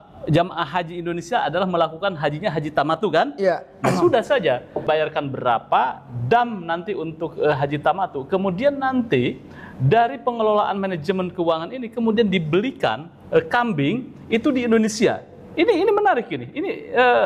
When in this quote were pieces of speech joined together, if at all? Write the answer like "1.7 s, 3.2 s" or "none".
4.7 s